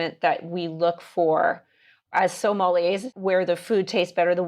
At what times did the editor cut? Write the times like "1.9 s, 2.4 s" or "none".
2.1 s, 3.1 s

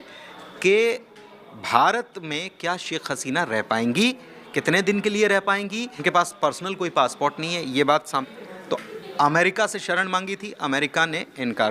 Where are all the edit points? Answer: 5.9 s, 8.3 s

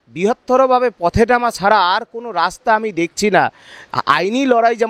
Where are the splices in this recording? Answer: none

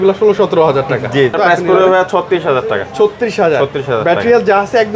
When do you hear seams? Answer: 1.3 s

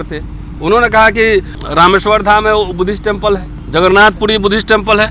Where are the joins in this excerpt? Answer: 1.6 s, 3.5 s

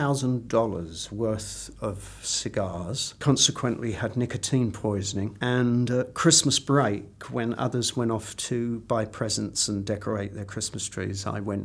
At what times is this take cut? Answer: 3.1 s, 5.3 s

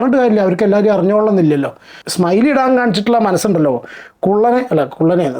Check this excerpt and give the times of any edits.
2.0 s

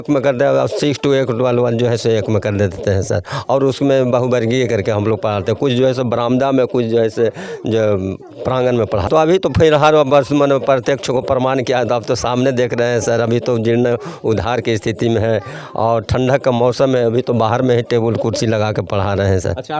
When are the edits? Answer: none

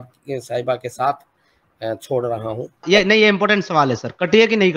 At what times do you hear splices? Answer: 2.8 s

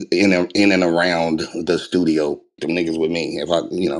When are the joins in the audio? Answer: 2.6 s

